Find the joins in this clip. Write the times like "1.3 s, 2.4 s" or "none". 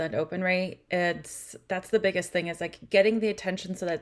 none